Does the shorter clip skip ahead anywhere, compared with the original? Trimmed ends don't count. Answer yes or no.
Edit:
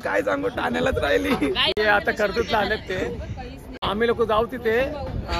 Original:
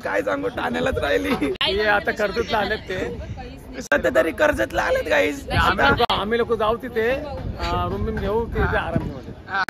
yes